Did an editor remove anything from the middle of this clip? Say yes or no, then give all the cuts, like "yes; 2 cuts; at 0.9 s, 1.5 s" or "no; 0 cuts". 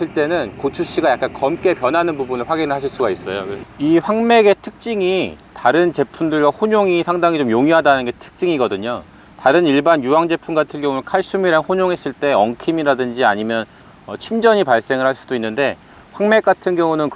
yes; 1 cut; at 3.7 s